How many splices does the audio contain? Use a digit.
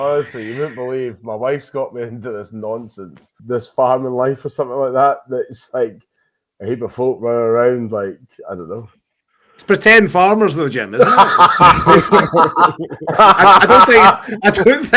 1